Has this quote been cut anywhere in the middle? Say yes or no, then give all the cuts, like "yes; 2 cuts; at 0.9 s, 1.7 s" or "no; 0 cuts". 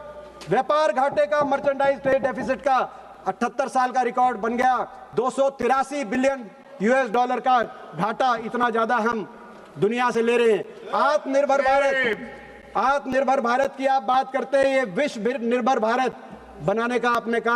no; 0 cuts